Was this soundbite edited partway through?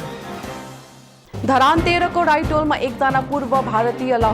yes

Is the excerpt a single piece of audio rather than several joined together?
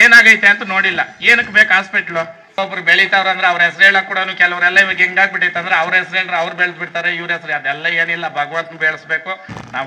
no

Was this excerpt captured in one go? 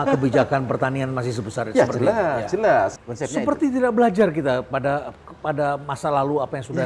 no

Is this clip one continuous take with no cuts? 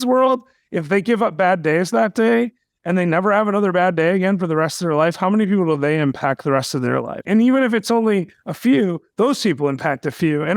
yes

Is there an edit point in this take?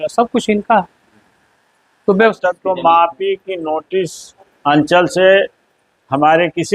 yes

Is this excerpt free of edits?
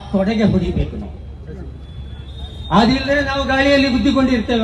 yes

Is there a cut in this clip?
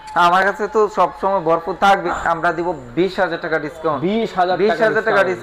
yes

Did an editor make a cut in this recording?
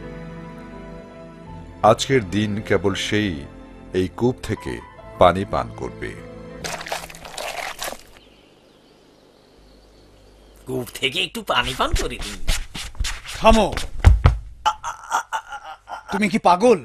yes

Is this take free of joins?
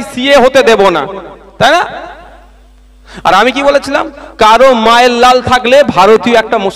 yes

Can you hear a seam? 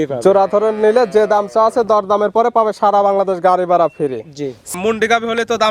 yes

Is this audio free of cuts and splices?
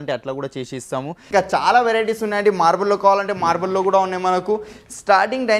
no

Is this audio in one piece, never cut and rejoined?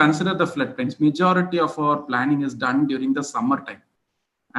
yes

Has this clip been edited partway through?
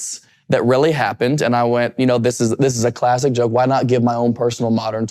no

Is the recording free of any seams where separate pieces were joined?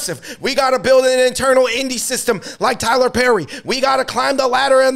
yes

